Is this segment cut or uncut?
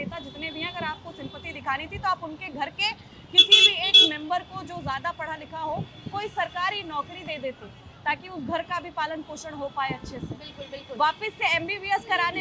uncut